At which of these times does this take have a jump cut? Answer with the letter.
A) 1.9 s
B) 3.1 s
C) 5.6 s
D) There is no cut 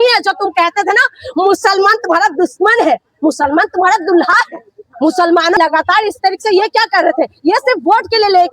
C